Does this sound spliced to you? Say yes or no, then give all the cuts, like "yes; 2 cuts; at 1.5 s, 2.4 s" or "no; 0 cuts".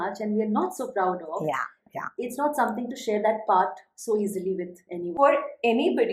yes; 1 cut; at 5.0 s